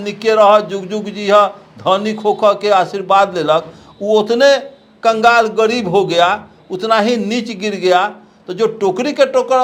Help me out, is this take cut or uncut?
uncut